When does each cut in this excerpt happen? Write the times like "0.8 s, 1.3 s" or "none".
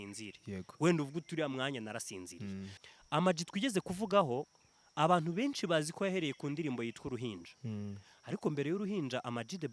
2.8 s